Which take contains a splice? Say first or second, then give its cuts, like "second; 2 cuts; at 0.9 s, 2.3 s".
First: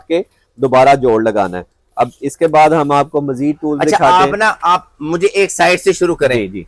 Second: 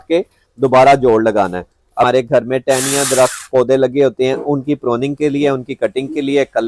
second; 1 cut; at 2.1 s